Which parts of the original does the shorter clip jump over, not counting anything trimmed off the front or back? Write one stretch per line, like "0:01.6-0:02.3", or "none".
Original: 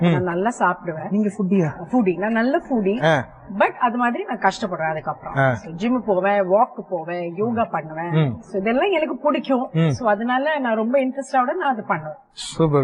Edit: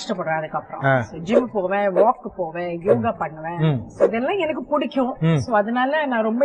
none